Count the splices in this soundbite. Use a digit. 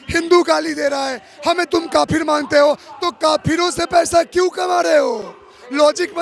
0